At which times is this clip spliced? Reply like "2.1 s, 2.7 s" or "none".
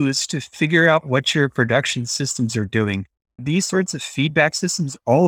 3.4 s